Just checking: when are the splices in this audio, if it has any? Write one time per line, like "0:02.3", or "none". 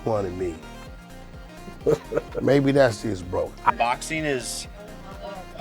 0:03.7